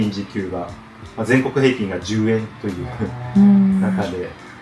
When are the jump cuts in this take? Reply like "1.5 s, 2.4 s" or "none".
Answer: none